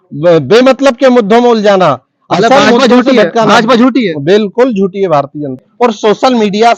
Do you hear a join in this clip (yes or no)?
yes